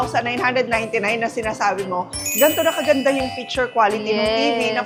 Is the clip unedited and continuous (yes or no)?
yes